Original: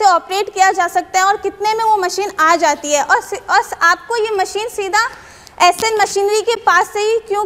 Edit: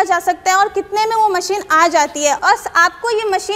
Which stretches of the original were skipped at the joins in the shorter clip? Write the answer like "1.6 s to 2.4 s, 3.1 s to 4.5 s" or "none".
3.1 s to 3.4 s